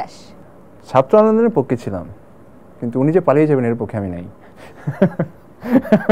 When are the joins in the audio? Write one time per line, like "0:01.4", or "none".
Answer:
none